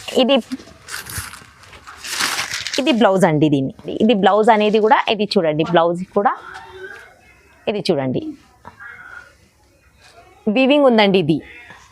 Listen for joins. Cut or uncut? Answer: cut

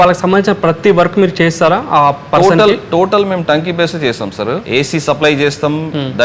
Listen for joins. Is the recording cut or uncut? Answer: cut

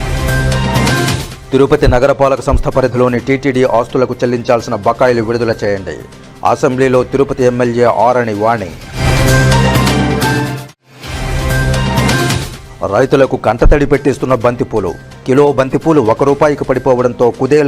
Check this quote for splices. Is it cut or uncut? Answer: cut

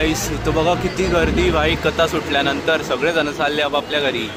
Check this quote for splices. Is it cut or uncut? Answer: uncut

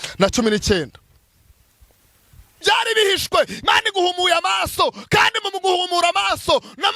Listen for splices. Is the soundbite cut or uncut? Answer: cut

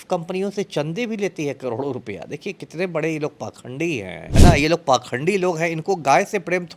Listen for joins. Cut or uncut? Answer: cut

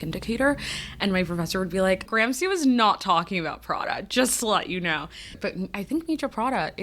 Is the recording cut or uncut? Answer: cut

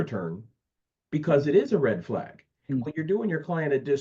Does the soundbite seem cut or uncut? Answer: cut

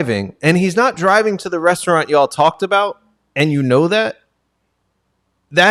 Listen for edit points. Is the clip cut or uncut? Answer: uncut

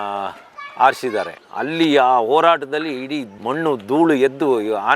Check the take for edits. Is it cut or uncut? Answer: cut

